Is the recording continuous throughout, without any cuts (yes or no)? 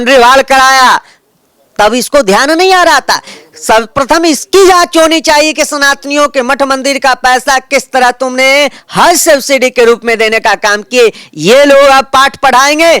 yes